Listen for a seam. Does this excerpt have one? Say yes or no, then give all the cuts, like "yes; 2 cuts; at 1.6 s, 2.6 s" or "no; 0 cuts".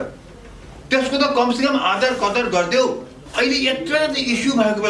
yes; 1 cut; at 3.3 s